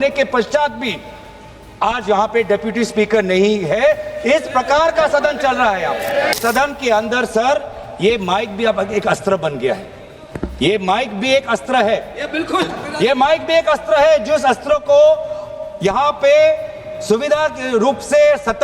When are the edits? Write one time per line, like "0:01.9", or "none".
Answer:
0:06.3